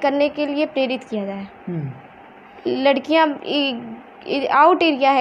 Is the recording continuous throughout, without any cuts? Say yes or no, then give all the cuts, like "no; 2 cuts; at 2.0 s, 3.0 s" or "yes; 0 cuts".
yes; 0 cuts